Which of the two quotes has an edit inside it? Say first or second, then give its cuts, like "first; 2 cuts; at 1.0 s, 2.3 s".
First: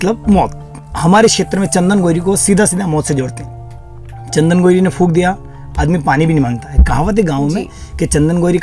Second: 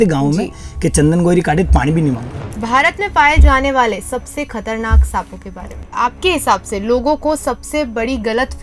second; 2 cuts; at 2.5 s, 5.8 s